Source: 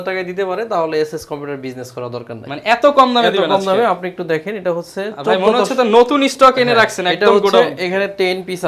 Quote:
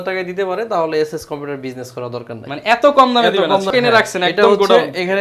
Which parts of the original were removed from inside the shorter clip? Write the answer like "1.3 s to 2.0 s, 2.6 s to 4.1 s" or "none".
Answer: 3.7 s to 6.5 s